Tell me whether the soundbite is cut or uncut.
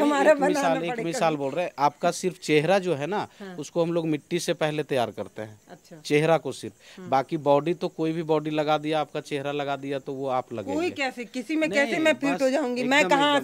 uncut